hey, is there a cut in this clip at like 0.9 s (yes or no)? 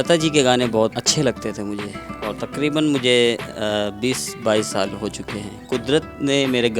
yes